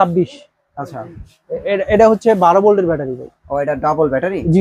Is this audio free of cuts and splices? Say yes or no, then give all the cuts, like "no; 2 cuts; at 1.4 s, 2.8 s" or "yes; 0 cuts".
yes; 0 cuts